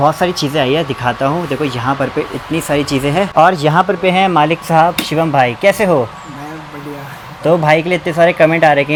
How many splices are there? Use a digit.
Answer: 0